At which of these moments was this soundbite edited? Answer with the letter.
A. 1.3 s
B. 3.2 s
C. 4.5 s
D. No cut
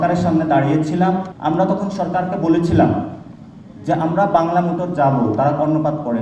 A